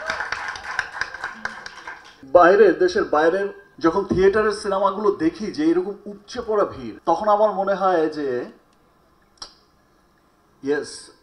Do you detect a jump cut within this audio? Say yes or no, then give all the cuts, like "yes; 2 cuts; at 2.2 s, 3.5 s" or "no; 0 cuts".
yes; 3 cuts; at 2.2 s, 3.6 s, 6.9 s